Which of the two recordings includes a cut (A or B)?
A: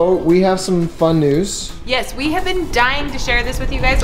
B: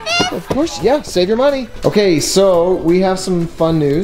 B